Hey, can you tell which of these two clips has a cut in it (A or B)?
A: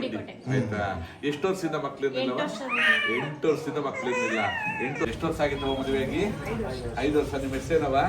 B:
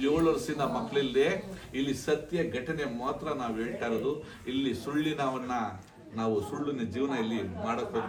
A